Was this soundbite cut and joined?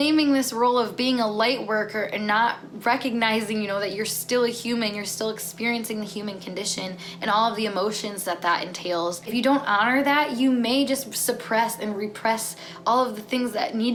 no; 0 cuts

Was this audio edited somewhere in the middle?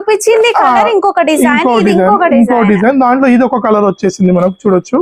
no; 0 cuts

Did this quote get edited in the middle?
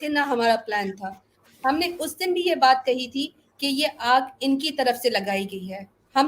no; 0 cuts

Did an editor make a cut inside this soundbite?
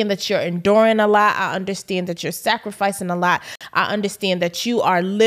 no; 0 cuts

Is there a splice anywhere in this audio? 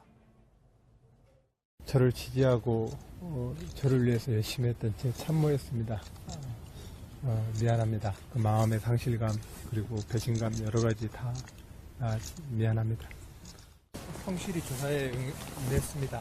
yes; 1 cut; at 4.3 s

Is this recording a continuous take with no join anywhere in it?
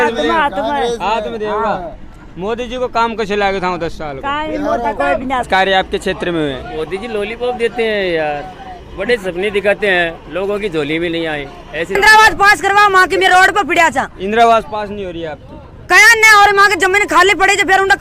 no; 2 cuts; at 5.5 s, 12.0 s

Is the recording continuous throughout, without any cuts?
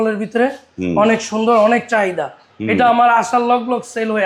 yes; 0 cuts

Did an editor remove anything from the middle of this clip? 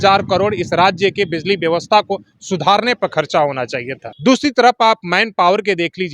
yes; 1 cut; at 4.0 s

